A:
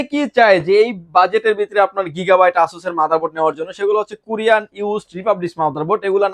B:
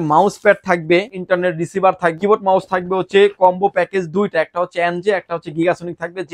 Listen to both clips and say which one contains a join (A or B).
B